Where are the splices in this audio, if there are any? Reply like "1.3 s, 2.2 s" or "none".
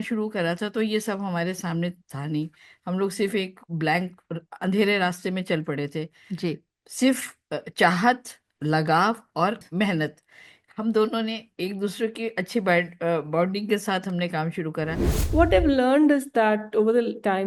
9.6 s, 15.2 s